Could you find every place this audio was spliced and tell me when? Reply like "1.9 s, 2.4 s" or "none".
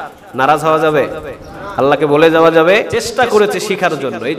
3.1 s